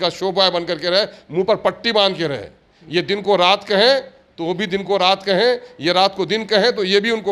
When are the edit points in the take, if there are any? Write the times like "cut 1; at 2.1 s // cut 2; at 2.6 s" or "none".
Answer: none